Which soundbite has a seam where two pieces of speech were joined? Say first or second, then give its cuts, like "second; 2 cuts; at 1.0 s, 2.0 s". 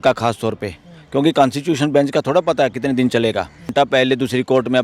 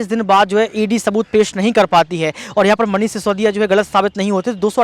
first; 1 cut; at 3.7 s